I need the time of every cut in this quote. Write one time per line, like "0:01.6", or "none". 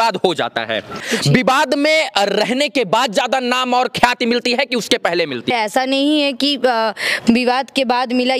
0:01.1
0:05.5